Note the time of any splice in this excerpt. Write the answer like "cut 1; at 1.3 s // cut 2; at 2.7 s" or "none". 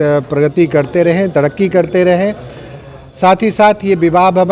none

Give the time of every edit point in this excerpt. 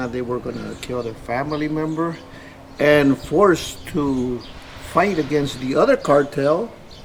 none

